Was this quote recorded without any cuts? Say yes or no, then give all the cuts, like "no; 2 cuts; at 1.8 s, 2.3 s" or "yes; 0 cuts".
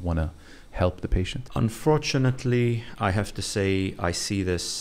no; 1 cut; at 1.4 s